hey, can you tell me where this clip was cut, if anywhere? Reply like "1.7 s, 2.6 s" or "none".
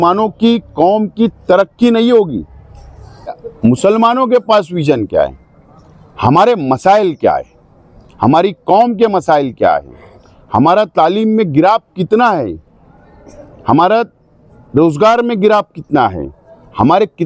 3.4 s